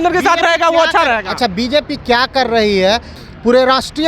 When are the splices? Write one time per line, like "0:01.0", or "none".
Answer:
0:03.1